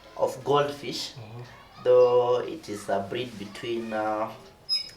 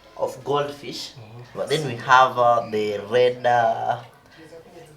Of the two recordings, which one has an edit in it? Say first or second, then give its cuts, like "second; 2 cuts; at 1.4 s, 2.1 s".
second; 1 cut; at 1.5 s